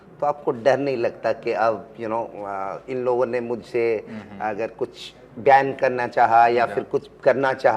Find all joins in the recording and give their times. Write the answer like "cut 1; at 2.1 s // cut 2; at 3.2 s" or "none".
none